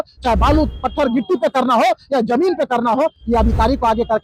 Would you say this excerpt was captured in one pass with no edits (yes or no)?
yes